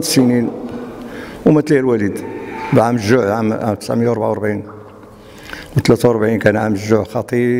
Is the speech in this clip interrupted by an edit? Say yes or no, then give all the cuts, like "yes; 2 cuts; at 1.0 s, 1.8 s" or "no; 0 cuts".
no; 0 cuts